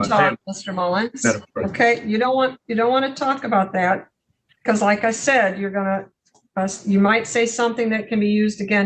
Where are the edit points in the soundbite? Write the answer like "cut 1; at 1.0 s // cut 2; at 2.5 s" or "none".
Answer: none